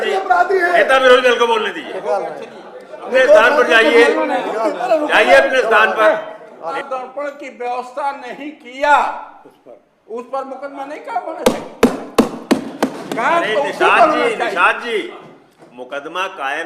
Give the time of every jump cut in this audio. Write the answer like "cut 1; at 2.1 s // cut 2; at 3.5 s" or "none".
cut 1; at 6.7 s

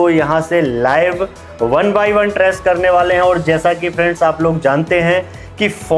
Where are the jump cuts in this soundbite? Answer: none

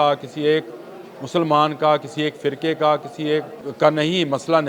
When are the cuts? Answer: cut 1; at 3.6 s

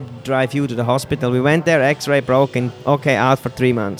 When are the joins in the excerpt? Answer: none

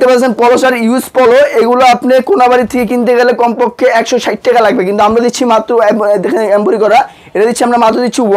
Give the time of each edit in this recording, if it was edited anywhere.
none

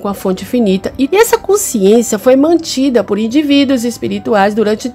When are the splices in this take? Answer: cut 1; at 1.1 s

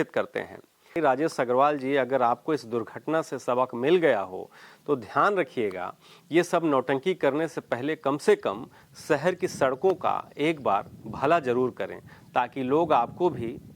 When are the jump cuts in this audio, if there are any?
cut 1; at 1.0 s

